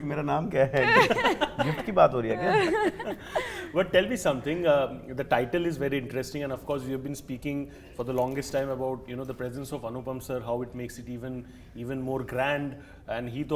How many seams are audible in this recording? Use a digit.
0